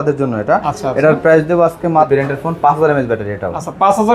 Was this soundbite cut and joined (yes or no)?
yes